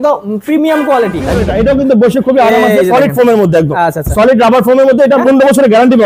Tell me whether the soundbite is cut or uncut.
cut